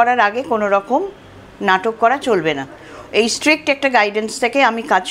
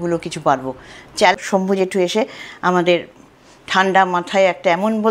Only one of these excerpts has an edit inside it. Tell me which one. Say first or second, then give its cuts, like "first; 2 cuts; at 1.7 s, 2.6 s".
second; 1 cut; at 1.4 s